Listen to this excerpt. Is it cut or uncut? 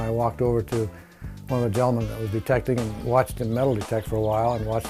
uncut